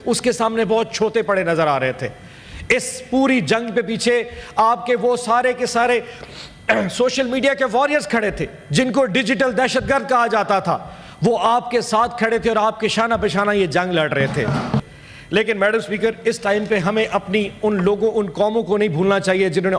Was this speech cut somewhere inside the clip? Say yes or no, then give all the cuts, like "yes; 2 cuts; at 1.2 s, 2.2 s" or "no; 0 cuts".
yes; 1 cut; at 14.8 s